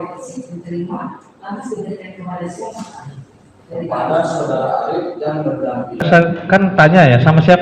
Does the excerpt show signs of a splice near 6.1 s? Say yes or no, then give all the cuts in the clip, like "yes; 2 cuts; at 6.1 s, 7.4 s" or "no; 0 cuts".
yes; 1 cut; at 6.1 s